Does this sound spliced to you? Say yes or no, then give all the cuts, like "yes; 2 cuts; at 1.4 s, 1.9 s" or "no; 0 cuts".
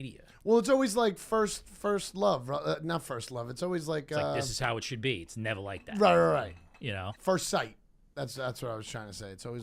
yes; 1 cut; at 7.1 s